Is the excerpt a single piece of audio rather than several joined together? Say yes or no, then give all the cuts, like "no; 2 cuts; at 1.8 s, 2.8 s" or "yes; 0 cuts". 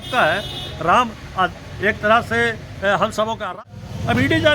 no; 1 cut; at 3.5 s